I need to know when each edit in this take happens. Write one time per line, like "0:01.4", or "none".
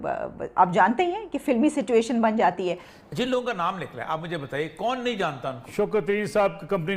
none